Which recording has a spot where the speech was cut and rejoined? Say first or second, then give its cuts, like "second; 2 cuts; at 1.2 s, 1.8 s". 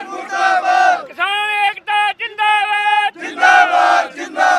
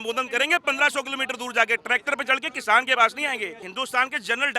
second; 1 cut; at 3.6 s